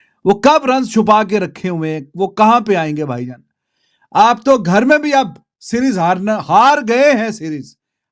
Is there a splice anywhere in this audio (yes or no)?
no